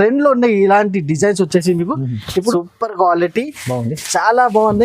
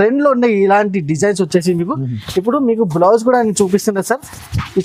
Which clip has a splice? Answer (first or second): first